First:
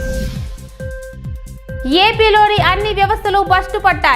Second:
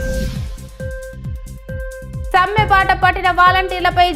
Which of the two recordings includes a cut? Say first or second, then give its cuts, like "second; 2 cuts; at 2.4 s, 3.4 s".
first; 1 cut; at 1.8 s